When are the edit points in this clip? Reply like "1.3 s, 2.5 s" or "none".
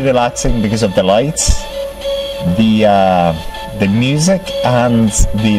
none